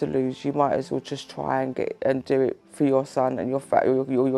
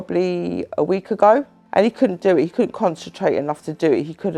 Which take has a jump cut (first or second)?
second